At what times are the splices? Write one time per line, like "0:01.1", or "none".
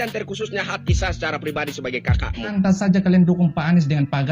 0:02.5